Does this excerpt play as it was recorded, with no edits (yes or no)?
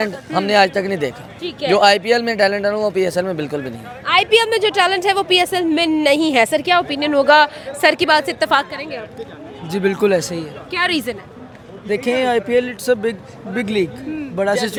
yes